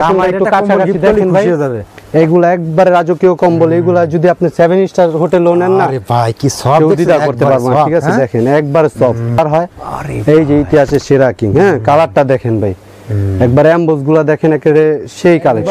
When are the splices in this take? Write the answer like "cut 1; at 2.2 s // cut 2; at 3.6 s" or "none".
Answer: cut 1; at 9.4 s